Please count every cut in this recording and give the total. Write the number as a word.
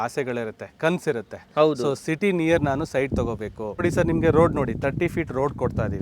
one